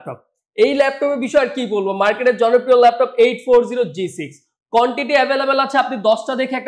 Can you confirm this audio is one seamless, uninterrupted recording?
yes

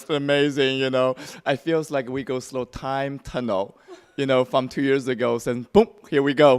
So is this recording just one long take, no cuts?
no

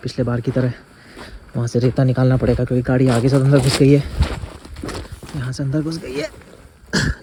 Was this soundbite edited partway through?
no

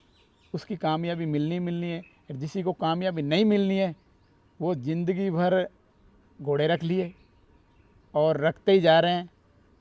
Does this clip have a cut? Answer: no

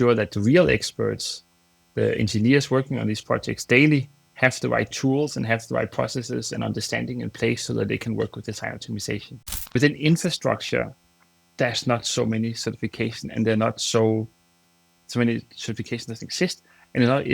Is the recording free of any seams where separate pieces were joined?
no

